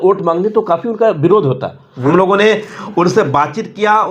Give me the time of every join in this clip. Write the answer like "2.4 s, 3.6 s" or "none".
2.0 s